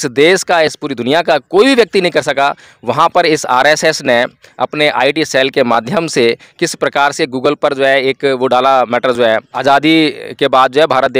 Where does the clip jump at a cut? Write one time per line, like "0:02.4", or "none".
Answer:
0:09.5